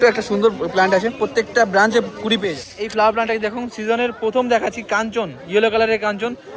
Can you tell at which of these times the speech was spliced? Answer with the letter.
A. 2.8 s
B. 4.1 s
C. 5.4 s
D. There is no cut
A